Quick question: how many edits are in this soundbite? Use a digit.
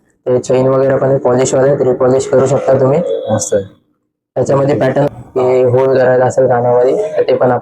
1